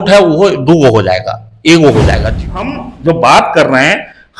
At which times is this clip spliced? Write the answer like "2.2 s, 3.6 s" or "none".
2.4 s